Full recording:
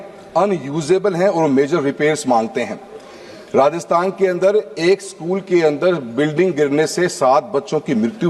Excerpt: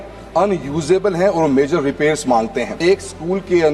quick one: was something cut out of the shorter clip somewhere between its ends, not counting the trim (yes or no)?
yes